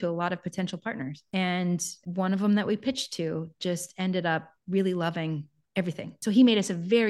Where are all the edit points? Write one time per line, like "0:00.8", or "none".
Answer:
0:01.2
0:02.0
0:06.1